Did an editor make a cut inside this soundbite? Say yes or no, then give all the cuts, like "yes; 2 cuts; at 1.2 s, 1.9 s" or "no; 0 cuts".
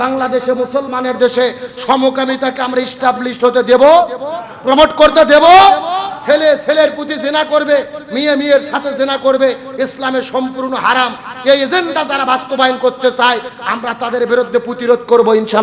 no; 0 cuts